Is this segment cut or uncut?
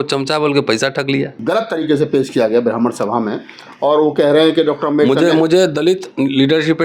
cut